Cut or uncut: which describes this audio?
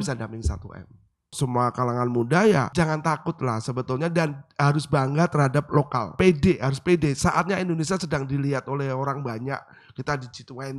cut